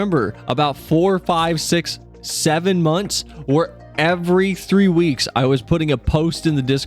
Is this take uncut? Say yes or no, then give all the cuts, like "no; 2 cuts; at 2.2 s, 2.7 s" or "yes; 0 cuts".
yes; 0 cuts